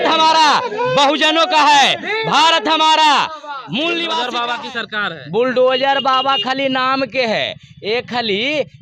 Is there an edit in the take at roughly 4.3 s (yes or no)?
yes